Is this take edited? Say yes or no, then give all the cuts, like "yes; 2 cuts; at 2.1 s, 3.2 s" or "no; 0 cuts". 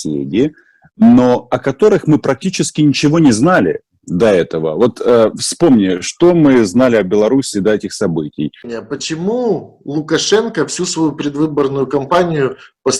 yes; 1 cut; at 8.8 s